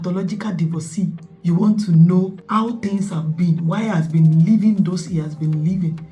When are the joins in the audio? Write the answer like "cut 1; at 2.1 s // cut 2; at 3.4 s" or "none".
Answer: cut 1; at 1.3 s // cut 2; at 2.4 s